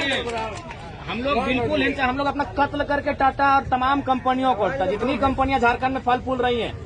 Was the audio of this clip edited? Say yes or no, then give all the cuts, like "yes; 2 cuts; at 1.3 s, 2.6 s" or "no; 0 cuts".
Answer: no; 0 cuts